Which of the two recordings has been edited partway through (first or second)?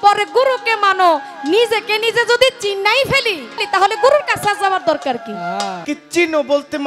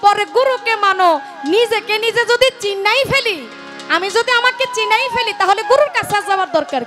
first